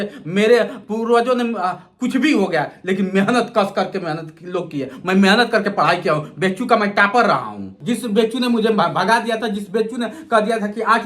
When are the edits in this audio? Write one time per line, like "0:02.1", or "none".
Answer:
0:07.7